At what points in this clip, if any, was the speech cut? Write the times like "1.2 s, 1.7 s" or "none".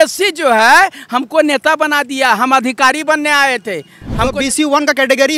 4.3 s